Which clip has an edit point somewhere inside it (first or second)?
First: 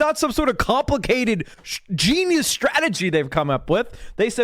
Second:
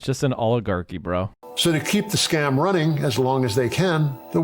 second